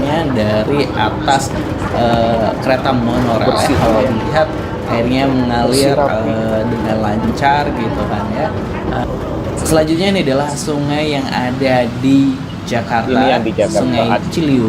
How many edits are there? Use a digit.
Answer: 1